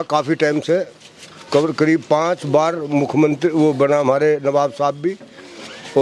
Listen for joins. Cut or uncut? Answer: uncut